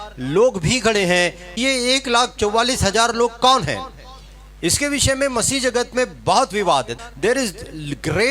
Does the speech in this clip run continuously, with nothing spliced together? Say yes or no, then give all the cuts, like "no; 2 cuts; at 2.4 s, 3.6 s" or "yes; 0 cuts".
no; 2 cuts; at 1.4 s, 6.9 s